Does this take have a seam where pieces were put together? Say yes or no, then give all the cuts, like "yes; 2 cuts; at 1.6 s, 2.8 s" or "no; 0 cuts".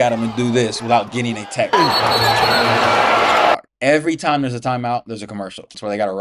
yes; 1 cut; at 3.5 s